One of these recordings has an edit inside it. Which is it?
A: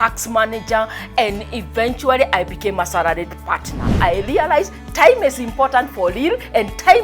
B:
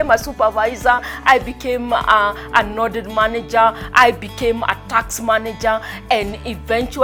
A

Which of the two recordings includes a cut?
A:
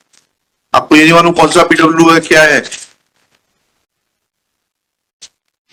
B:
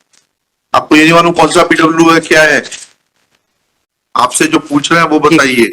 B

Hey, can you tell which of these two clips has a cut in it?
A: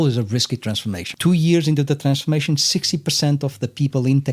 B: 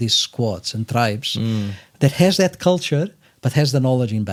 A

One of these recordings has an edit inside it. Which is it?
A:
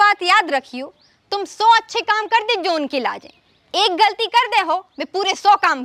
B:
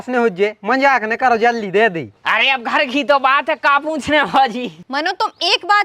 B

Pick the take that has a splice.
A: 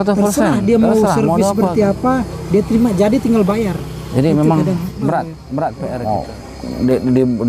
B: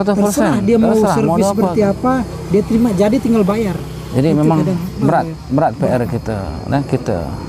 A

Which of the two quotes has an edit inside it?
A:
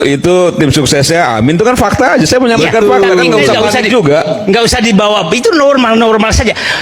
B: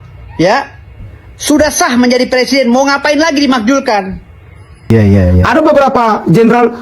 B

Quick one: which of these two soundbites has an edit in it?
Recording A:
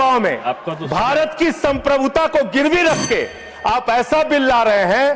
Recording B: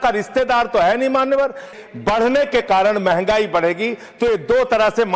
B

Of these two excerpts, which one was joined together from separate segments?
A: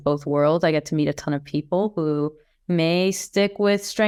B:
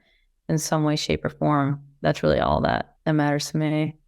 B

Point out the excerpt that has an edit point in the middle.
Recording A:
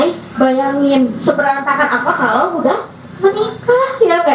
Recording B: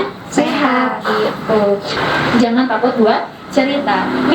B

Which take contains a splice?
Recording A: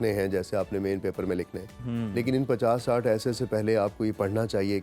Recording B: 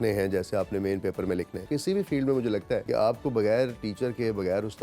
B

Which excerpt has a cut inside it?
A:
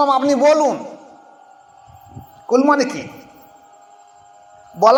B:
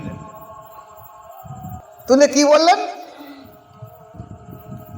B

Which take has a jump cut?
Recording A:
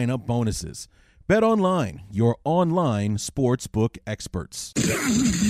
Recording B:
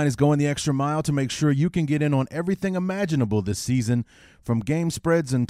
A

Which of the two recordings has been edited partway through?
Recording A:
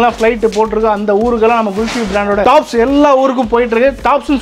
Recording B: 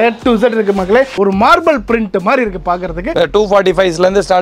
B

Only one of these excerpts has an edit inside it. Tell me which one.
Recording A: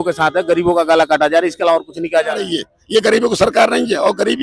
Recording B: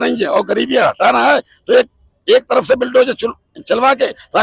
A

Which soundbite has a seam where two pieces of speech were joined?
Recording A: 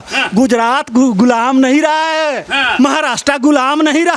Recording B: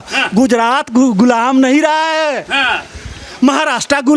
A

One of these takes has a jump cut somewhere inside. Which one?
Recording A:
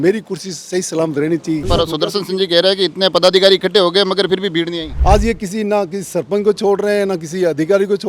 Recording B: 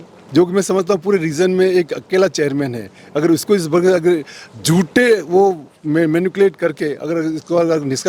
A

